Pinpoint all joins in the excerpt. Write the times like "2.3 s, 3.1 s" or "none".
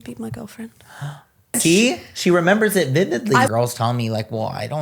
1.6 s, 3.5 s